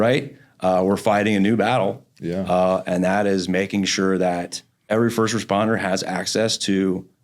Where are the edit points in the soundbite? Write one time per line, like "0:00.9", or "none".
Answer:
0:04.8